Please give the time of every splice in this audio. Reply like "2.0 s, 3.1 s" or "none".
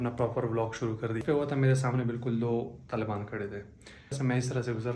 1.2 s, 4.2 s